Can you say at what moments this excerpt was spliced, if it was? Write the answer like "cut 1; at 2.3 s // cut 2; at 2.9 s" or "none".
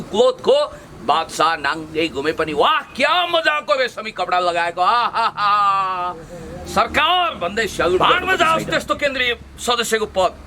cut 1; at 8.0 s